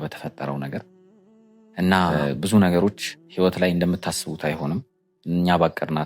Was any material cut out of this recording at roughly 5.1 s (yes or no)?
no